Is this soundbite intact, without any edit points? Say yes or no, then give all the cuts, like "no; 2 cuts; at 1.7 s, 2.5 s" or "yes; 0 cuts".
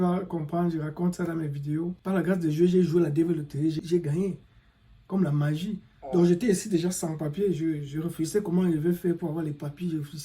no; 2 cuts; at 2.0 s, 3.8 s